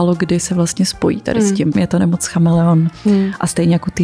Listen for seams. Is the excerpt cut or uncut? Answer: cut